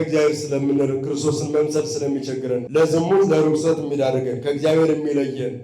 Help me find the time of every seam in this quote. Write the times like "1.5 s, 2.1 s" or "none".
2.7 s